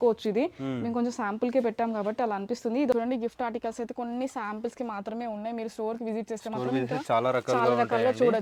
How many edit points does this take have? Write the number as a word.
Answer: one